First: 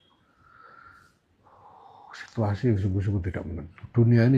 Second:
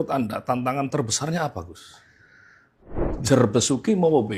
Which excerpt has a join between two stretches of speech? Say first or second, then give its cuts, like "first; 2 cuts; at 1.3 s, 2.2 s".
second; 1 cut; at 2.8 s